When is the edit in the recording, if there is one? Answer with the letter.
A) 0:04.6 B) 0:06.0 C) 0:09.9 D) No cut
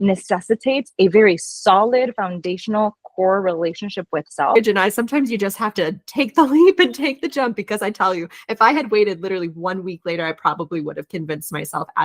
A